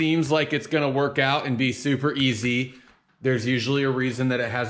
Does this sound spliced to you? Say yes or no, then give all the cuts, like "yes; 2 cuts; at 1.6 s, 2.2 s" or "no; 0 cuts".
no; 0 cuts